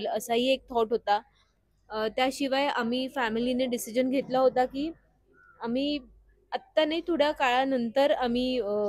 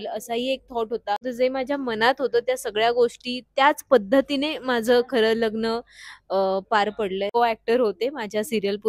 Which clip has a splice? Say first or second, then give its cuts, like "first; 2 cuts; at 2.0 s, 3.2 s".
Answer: second; 2 cuts; at 1.3 s, 7.4 s